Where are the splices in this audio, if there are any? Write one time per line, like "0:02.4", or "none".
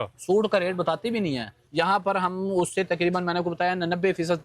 0:01.6

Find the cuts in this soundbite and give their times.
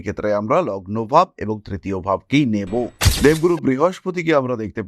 0:03.0

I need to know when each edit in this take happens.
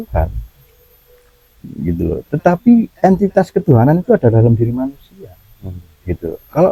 none

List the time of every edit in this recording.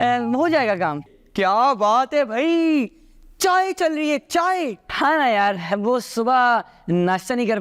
0:01.2

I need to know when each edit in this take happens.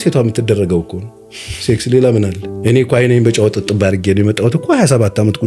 0:02.5

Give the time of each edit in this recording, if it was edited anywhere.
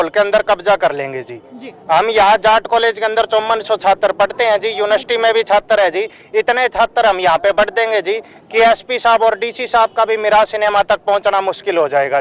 none

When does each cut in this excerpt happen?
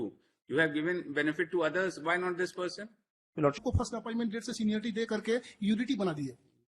0:03.6

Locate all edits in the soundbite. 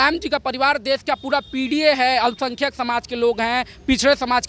none

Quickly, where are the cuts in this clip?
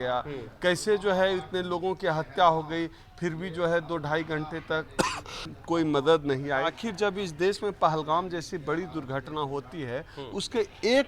0:05.3
0:06.8

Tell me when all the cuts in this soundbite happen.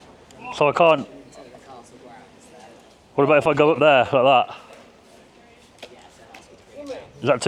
none

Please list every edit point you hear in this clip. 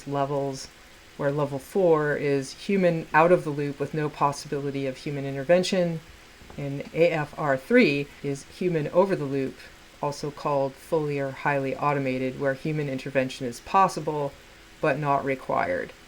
none

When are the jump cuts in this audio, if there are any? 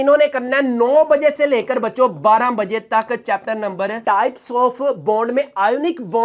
0:04.0

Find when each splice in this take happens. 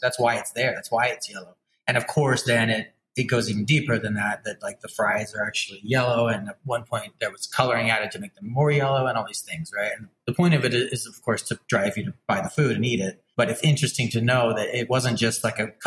0:10.2
0:12.1
0:13.2
0:14.9

